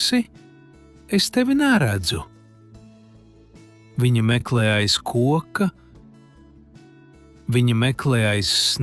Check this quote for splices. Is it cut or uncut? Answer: cut